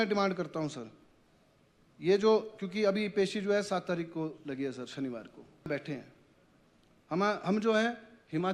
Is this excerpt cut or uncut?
cut